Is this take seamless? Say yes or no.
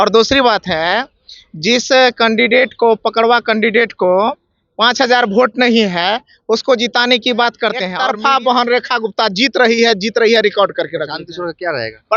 no